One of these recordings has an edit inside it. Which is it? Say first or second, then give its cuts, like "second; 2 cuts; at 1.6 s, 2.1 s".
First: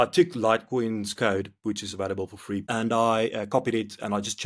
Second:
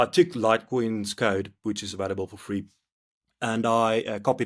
first; 1 cut; at 2.6 s